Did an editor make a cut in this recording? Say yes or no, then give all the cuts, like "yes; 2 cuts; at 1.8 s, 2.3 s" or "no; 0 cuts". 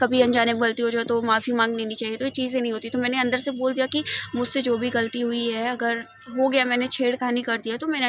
no; 0 cuts